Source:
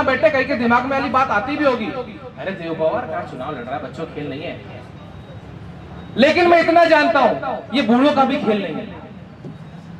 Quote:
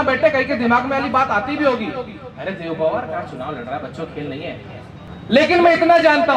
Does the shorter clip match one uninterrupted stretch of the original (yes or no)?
no